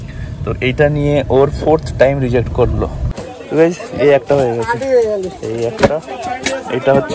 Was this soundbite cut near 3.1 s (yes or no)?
yes